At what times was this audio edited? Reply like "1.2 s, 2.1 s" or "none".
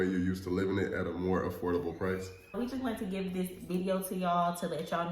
2.6 s